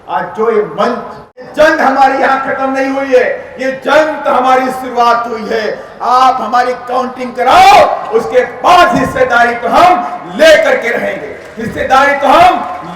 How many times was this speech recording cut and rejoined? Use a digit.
1